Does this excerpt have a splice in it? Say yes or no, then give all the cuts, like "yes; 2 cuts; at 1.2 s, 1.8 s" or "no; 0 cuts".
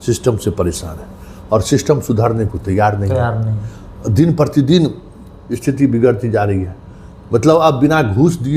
no; 0 cuts